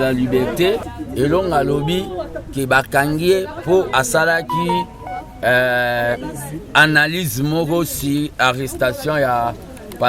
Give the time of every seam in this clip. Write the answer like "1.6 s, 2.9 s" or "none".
1.0 s

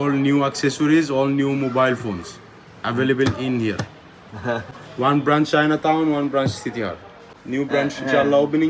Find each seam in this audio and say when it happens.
7.3 s

